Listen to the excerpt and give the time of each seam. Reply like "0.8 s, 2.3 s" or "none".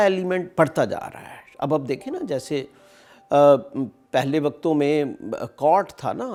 none